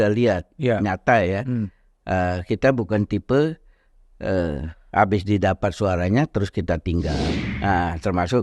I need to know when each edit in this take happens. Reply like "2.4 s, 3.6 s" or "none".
7.3 s